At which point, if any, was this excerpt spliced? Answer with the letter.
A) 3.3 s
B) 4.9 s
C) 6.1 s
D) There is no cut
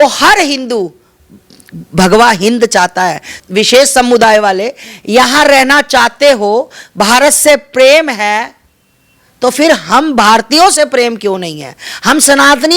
A